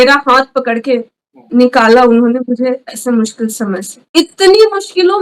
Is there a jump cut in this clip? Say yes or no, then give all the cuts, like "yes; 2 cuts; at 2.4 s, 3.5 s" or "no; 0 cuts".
yes; 1 cut; at 4.1 s